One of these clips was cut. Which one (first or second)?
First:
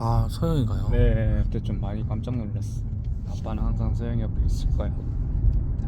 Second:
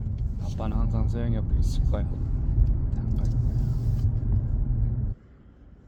first